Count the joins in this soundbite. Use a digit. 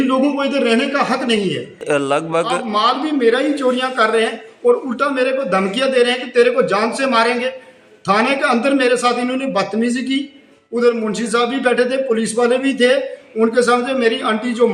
1